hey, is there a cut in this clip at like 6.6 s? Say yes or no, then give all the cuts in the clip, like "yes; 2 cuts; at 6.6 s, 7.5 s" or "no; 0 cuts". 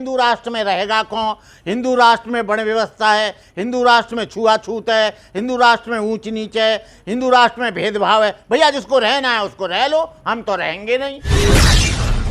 no; 1 cut; at 11.2 s